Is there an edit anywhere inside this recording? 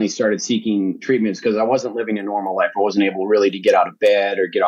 no; 0 cuts

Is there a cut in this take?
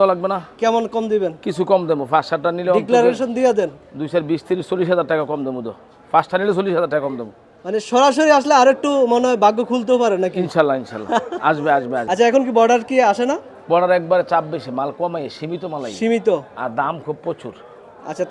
yes; 1 cut; at 12.0 s

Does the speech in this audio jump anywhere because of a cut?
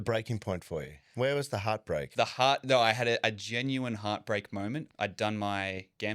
yes; 3 cuts; at 1.0 s, 2.1 s, 4.9 s

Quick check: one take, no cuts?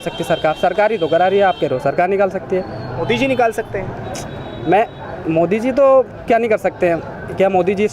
yes; 0 cuts

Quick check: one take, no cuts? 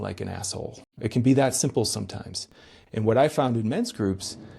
no; 1 cut; at 0.9 s

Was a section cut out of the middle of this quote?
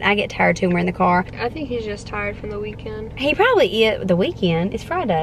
yes; 1 cut; at 1.4 s

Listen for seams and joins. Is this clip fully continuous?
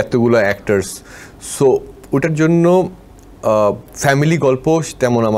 yes; 0 cuts

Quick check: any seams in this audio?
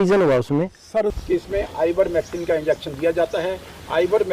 yes; 1 cut; at 1.2 s

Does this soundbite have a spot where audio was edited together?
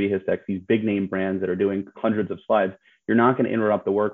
no; 0 cuts

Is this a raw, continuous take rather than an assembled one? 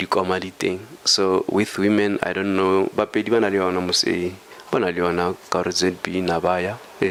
yes; 0 cuts

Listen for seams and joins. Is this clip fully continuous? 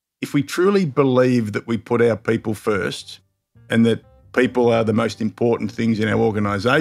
yes; 0 cuts

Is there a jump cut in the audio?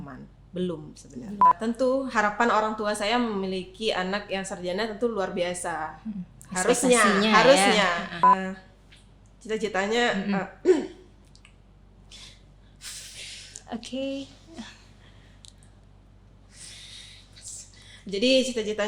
yes; 2 cuts; at 1.4 s, 8.2 s

